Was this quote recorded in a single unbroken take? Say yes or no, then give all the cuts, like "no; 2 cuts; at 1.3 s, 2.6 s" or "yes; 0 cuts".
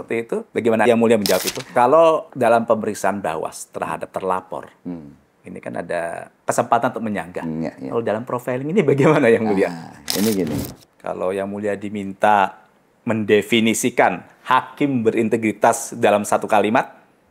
no; 4 cuts; at 1.5 s, 2.3 s, 6.3 s, 10.7 s